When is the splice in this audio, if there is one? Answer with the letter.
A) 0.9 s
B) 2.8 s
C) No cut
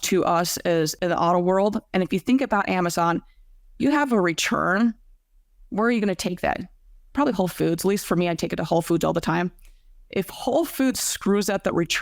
A